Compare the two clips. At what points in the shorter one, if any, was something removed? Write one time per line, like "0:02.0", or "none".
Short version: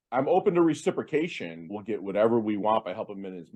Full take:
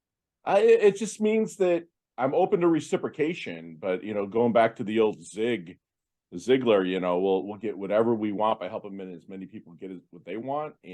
0:01.7